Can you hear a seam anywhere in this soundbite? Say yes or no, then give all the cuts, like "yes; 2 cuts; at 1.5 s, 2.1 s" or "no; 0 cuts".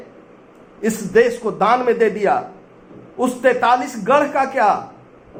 no; 0 cuts